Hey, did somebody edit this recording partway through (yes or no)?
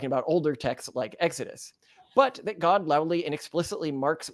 no